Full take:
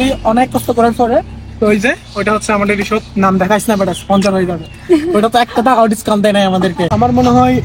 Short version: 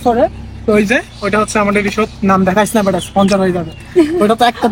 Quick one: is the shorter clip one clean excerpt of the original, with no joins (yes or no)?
yes